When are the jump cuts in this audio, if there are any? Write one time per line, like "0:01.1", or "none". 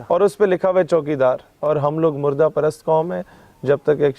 0:01.5